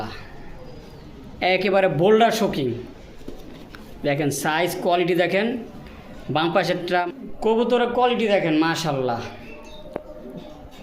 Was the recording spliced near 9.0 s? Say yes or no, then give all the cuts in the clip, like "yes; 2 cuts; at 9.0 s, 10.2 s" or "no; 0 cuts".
no; 1 cut; at 7.1 s